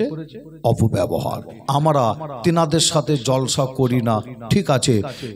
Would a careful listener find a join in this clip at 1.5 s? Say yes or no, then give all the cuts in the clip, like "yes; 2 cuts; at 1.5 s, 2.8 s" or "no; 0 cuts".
yes; 1 cut; at 1.5 s